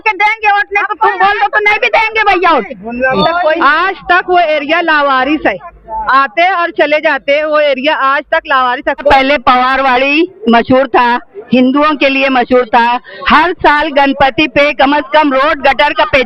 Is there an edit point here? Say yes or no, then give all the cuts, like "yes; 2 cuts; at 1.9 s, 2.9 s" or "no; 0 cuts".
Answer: yes; 2 cuts; at 3.2 s, 9.1 s